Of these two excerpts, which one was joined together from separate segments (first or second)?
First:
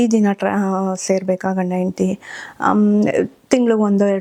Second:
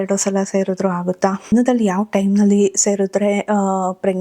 second